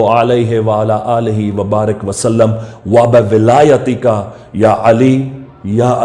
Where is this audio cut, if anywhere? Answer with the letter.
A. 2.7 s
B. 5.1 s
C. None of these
C